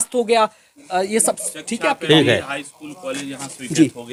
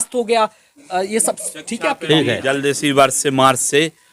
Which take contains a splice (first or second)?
second